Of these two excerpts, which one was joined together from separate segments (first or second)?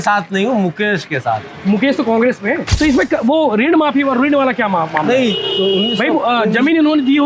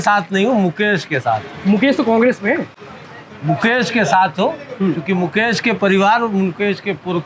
first